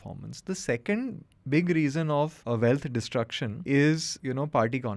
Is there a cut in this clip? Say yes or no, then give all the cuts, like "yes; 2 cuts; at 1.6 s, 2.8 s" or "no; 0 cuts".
yes; 3 cuts; at 2.4 s, 3.5 s, 4.1 s